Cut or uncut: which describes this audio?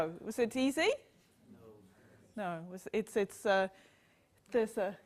uncut